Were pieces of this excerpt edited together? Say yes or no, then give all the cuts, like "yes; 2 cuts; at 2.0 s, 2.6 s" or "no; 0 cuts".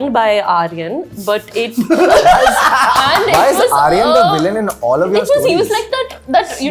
no; 0 cuts